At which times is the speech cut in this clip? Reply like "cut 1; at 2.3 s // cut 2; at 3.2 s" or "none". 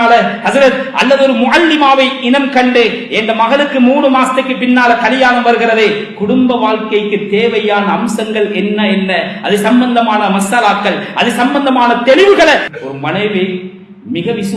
cut 1; at 12.7 s